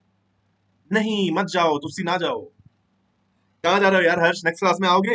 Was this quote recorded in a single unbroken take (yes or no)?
yes